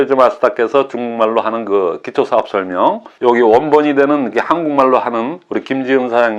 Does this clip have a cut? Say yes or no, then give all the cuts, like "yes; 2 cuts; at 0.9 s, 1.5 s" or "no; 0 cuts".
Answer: yes; 1 cut; at 3.1 s